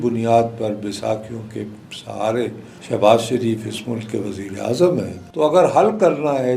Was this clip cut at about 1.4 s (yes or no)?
no